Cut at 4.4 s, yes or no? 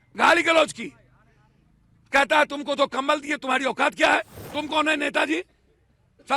yes